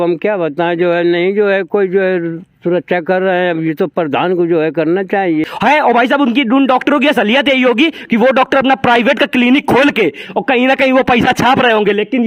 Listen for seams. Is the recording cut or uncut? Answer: cut